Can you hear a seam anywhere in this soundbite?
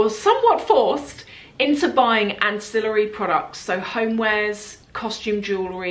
no; 0 cuts

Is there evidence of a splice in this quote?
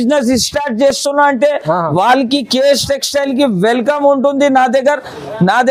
no; 0 cuts

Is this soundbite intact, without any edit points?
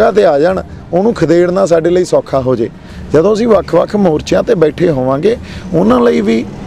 yes; 0 cuts

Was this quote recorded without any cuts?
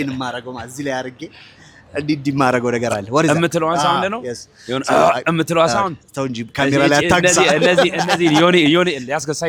yes; 0 cuts

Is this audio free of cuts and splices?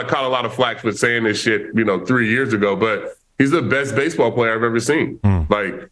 yes; 0 cuts

